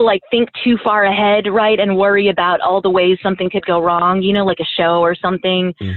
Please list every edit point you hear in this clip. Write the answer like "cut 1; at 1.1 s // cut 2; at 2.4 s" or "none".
none